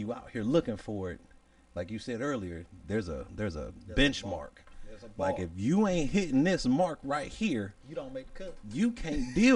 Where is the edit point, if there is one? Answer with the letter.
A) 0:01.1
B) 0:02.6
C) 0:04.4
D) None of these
D